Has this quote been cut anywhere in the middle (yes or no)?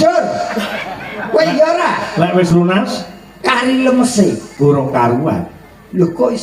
no